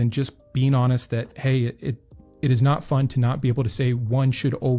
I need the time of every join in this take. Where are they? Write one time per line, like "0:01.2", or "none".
0:01.3